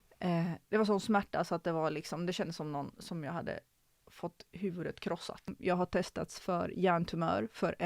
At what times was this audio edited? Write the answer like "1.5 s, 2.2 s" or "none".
5.5 s